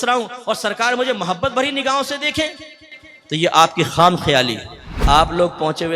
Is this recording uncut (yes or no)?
no